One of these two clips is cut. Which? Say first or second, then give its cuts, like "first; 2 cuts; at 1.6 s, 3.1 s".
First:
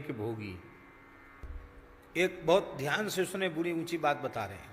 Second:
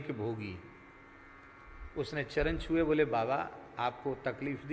first; 1 cut; at 1.4 s